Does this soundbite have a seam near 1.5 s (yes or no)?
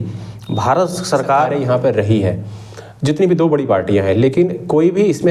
yes